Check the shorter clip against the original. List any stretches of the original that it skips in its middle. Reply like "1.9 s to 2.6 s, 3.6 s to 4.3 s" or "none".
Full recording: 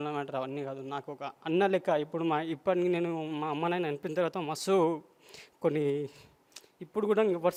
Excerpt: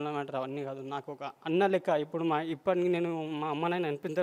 none